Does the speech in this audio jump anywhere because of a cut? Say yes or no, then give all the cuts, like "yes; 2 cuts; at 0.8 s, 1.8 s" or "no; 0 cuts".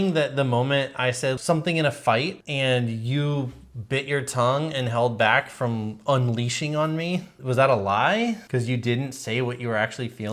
yes; 4 cuts; at 1.4 s, 2.4 s, 7.3 s, 8.4 s